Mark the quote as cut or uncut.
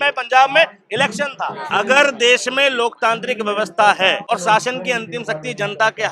cut